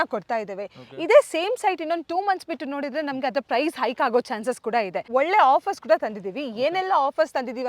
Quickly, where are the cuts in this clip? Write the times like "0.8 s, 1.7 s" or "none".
5.0 s